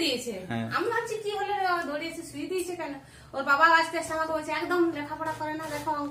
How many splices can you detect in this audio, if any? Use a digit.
0